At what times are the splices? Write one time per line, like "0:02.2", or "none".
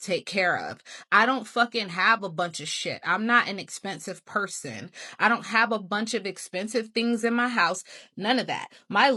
none